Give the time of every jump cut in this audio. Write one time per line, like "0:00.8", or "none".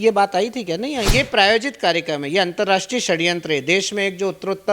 0:01.1

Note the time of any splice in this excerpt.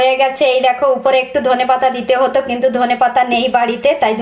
none

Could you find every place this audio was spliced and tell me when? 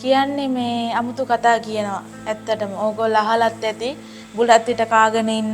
none

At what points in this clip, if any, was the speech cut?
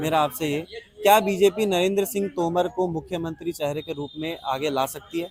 none

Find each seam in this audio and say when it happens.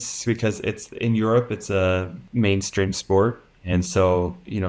0:02.2
0:03.5

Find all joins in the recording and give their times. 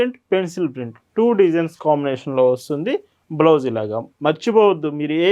none

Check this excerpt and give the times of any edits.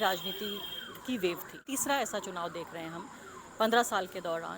0:01.7

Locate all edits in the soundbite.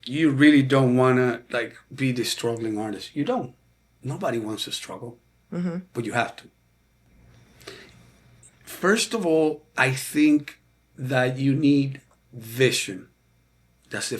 none

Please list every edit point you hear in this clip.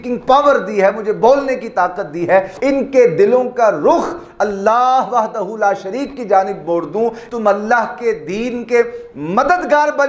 0:02.5
0:07.2

